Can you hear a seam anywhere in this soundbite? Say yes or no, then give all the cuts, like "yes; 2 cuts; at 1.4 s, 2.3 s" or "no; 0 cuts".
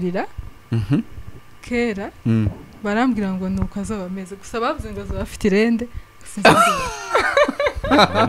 no; 0 cuts